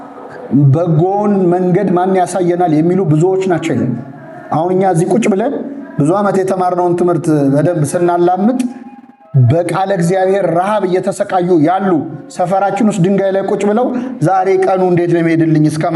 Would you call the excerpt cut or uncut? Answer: uncut